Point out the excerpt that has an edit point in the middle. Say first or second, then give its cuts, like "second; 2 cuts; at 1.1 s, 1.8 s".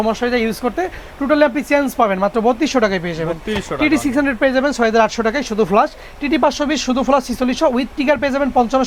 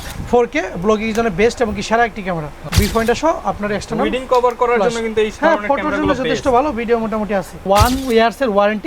second; 2 cuts; at 2.5 s, 7.7 s